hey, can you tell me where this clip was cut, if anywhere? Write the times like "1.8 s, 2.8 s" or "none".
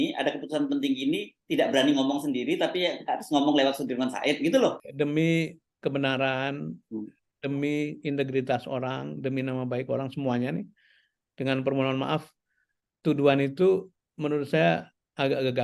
4.8 s